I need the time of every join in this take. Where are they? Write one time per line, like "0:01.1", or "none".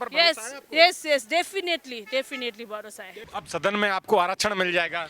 0:03.3